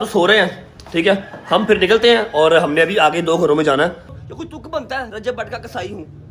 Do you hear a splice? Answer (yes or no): yes